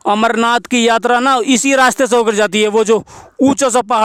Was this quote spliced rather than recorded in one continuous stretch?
no; 0 cuts

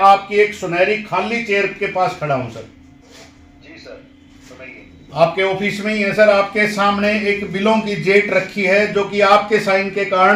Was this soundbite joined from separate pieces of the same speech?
no; 0 cuts

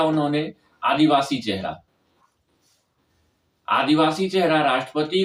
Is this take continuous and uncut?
yes; 0 cuts

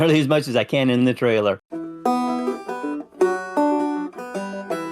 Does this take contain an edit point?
yes; 1 cut; at 1.7 s

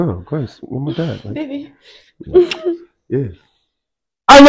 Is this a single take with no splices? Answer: yes; 0 cuts

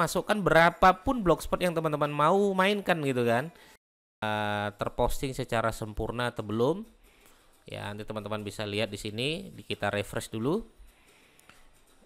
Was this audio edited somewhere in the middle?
yes; 1 cut; at 4.2 s

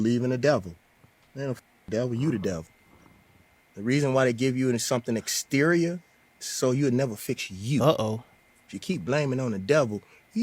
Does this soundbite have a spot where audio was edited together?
no; 0 cuts

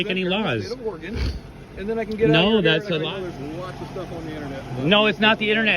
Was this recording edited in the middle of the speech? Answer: yes; 1 cut; at 3.0 s

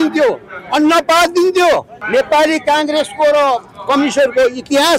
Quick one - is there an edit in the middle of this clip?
yes; 1 cut; at 1.9 s

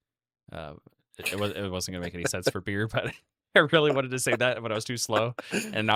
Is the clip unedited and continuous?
yes; 0 cuts

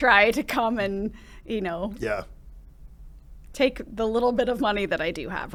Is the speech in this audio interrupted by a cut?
no; 0 cuts

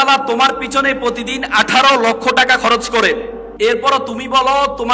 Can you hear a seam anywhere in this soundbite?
yes; 1 cut; at 3.4 s

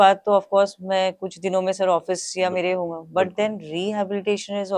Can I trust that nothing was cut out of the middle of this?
yes; 0 cuts

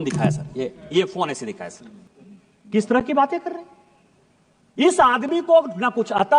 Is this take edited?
yes; 1 cut; at 1.7 s

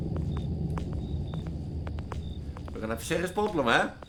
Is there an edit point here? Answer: no; 0 cuts

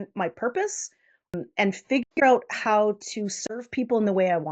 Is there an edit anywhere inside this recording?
yes; 1 cut; at 1.3 s

